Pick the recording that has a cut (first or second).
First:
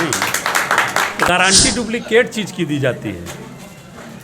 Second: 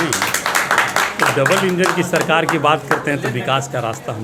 first